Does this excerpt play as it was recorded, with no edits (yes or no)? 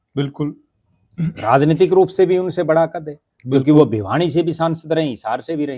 yes